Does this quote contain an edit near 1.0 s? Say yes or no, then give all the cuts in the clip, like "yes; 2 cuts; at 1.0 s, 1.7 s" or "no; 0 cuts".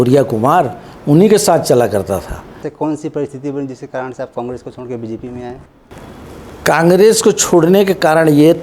no; 1 cut; at 2.6 s